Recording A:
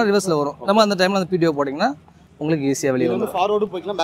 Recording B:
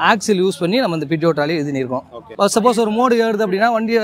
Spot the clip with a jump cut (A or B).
B